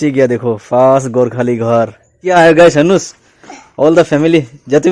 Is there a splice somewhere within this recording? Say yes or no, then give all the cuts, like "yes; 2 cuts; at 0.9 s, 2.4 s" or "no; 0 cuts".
yes; 1 cut; at 2.3 s